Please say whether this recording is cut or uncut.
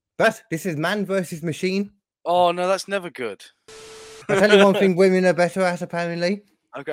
cut